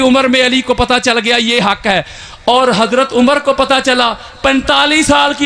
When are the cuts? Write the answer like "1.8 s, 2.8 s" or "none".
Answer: none